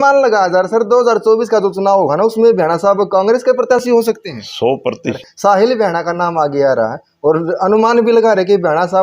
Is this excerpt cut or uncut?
cut